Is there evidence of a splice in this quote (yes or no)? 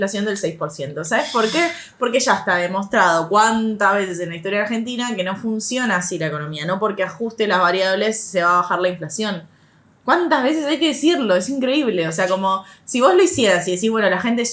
no